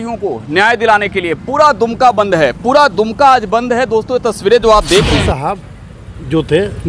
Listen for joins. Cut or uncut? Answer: cut